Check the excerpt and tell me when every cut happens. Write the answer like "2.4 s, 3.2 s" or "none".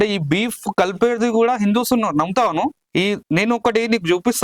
2.8 s